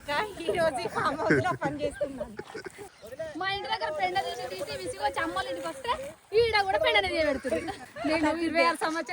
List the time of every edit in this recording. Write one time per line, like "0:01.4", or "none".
0:02.9
0:07.8

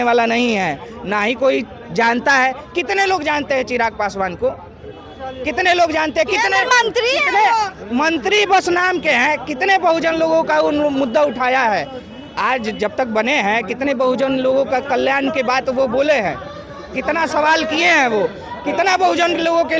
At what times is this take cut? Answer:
none

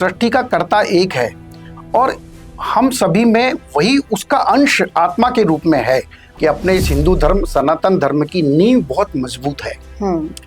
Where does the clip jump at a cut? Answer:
0:06.2

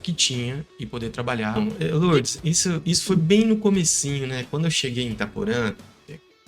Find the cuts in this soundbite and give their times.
0:01.6

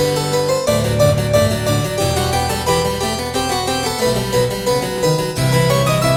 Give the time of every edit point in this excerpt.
none

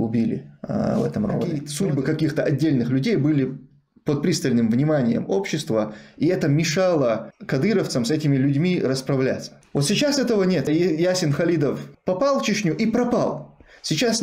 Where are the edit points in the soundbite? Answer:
0:01.7
0:07.3
0:10.7
0:11.9

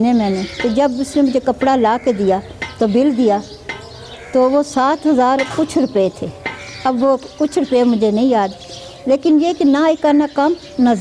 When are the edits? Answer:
none

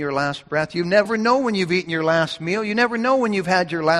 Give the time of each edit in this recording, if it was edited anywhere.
0:01.1

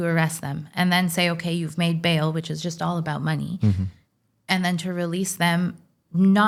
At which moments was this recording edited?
none

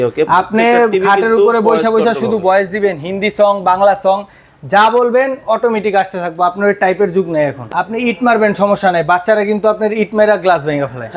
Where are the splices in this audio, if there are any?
0:07.6

